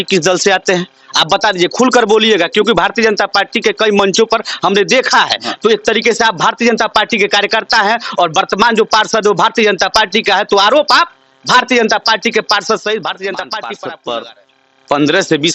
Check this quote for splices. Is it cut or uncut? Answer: cut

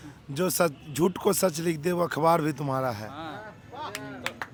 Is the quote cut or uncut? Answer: uncut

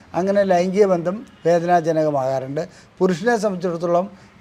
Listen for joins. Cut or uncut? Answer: uncut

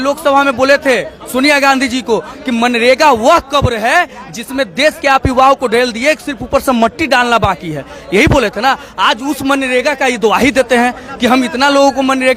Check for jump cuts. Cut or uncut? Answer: uncut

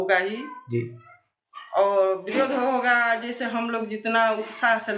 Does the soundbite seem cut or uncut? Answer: uncut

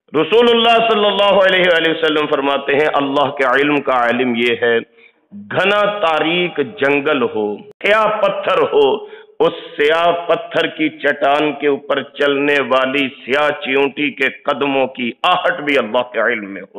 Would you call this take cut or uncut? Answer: cut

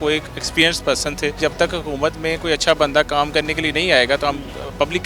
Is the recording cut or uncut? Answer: cut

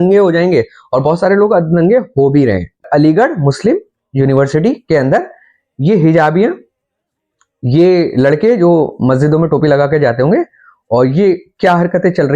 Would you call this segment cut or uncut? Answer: cut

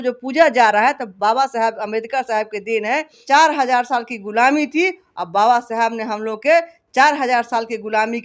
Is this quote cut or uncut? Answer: cut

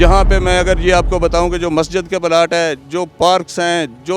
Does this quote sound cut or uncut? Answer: uncut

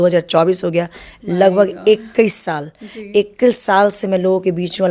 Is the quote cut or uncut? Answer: uncut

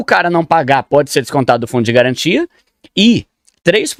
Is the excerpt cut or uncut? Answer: uncut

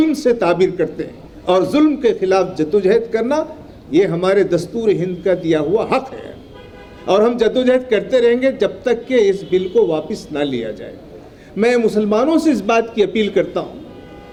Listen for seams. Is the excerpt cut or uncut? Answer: uncut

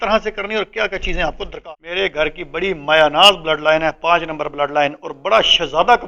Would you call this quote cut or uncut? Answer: cut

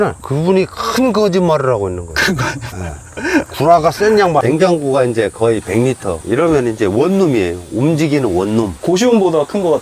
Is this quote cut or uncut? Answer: cut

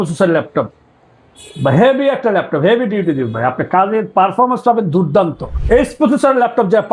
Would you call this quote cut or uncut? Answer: cut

